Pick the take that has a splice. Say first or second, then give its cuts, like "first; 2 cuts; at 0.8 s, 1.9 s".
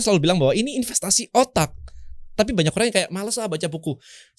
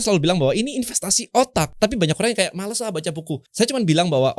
second; 2 cuts; at 1.7 s, 3.5 s